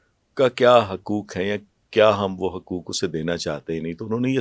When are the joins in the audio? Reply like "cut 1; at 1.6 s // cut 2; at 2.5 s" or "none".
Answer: none